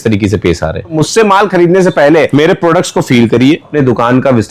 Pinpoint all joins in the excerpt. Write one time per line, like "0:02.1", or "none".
0:01.0
0:02.3
0:03.7